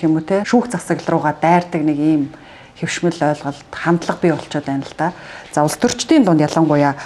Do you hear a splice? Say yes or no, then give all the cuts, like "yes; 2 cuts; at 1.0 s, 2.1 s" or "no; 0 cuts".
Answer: no; 0 cuts